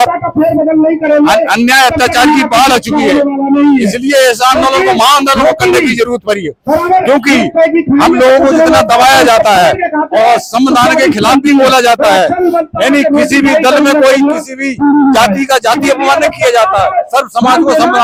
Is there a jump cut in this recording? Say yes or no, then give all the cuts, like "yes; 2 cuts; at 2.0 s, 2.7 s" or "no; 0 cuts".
no; 0 cuts